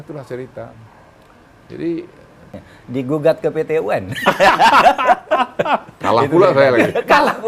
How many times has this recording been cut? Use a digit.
1